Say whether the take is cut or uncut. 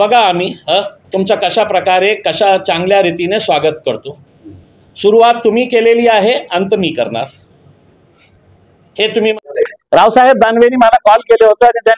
uncut